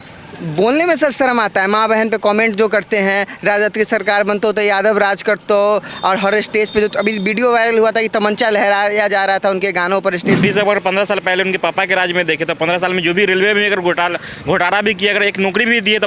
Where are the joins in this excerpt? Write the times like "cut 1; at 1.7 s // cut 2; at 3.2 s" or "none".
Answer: cut 1; at 10.4 s